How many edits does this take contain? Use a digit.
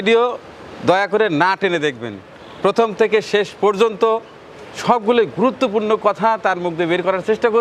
0